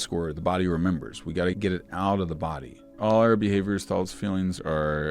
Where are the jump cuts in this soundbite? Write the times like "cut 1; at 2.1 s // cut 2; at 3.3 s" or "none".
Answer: cut 1; at 1.5 s // cut 2; at 3.0 s